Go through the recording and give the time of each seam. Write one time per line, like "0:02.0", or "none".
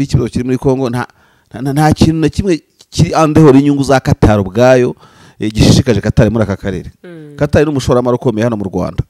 none